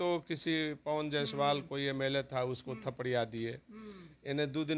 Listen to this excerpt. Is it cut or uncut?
uncut